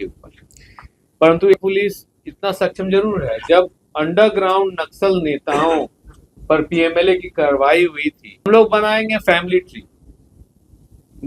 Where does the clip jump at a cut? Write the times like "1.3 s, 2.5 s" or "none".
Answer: 1.5 s, 8.5 s